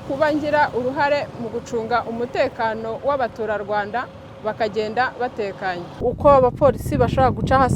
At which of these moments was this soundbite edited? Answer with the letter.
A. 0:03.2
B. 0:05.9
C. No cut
B